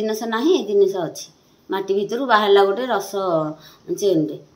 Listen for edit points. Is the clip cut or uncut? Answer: uncut